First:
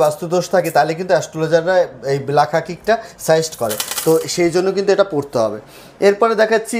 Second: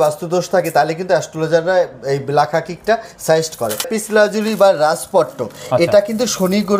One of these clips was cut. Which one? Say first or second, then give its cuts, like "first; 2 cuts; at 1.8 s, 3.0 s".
second; 1 cut; at 3.9 s